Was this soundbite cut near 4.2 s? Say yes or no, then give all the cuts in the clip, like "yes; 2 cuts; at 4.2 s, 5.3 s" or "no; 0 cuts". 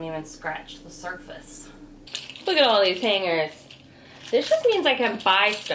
no; 1 cut; at 2.1 s